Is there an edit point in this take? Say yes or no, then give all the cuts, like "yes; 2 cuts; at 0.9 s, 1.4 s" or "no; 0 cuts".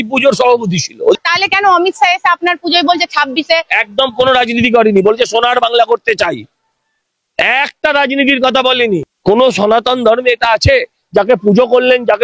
yes; 2 cuts; at 1.2 s, 9.1 s